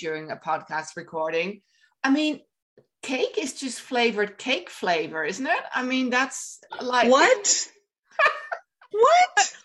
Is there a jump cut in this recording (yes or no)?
no